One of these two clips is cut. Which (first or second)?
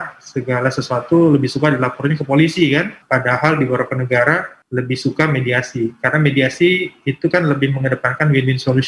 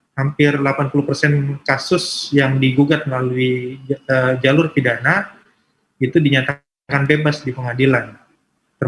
first